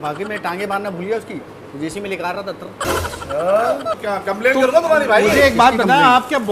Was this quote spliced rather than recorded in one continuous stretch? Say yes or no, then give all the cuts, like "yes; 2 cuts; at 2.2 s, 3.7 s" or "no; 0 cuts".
yes; 1 cut; at 4.0 s